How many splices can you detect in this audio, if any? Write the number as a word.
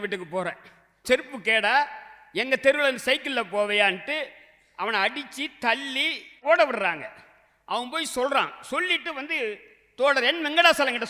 two